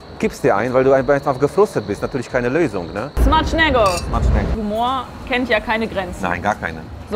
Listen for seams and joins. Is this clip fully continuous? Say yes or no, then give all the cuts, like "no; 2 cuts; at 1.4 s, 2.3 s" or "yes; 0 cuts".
no; 2 cuts; at 3.2 s, 4.6 s